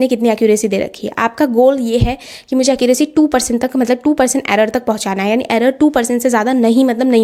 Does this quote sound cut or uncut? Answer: uncut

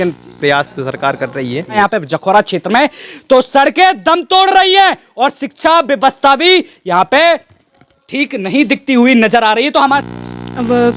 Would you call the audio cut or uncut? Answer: cut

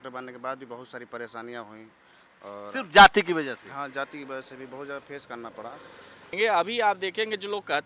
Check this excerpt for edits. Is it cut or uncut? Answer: cut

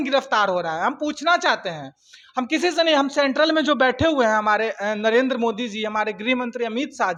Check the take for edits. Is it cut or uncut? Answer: uncut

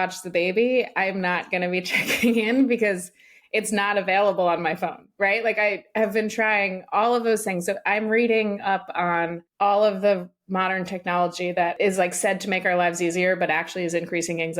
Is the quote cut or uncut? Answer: cut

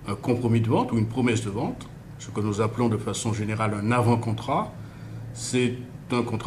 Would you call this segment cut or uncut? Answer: uncut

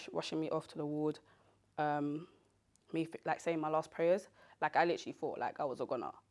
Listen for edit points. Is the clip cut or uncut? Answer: uncut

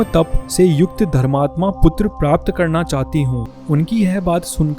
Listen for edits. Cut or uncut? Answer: cut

